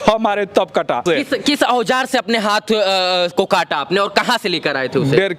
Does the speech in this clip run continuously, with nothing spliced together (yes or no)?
no